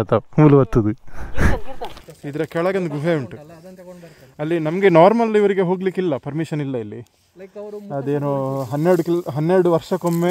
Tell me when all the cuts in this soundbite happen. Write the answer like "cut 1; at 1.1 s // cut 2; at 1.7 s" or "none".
cut 1; at 1.8 s